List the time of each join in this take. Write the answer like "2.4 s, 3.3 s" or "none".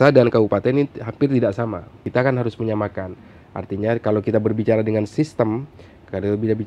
2.0 s